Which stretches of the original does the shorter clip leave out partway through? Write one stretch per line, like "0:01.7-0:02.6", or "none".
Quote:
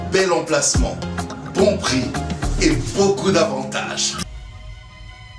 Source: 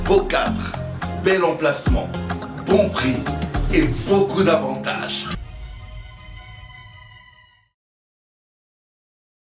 0:05.4-0:05.5